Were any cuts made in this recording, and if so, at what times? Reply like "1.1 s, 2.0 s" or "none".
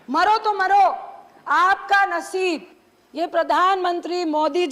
none